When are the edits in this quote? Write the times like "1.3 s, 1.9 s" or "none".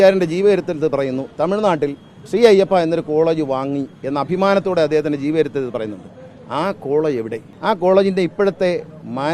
2.1 s, 7.4 s